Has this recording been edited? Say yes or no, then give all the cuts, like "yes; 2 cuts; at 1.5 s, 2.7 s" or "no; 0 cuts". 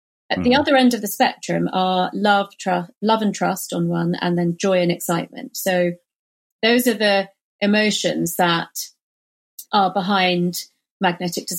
no; 0 cuts